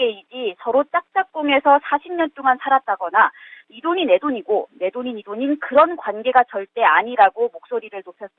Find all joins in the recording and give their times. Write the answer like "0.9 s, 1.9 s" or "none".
2.0 s